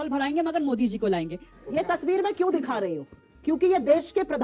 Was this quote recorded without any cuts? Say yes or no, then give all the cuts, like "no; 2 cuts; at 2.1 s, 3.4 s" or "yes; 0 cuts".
no; 1 cut; at 1.5 s